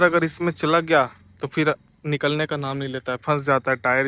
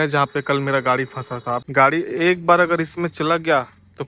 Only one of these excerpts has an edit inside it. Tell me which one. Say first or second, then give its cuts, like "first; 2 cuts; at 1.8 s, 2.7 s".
second; 1 cut; at 1.6 s